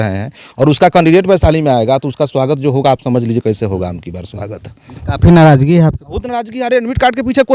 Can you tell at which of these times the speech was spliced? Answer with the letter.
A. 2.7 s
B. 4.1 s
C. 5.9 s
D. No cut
D